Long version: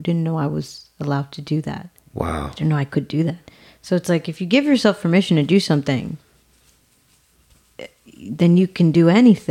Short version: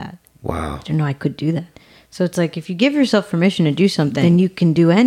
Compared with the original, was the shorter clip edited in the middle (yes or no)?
yes